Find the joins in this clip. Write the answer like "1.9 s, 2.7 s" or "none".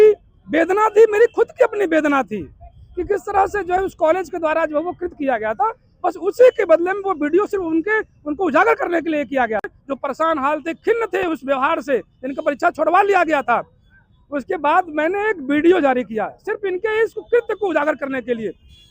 9.8 s

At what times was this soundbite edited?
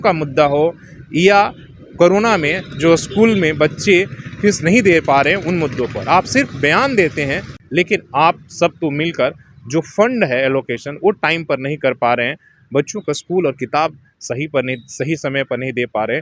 7.5 s

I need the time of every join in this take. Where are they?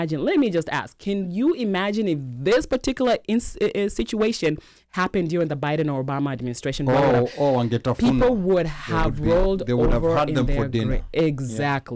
none

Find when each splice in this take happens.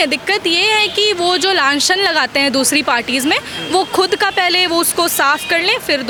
none

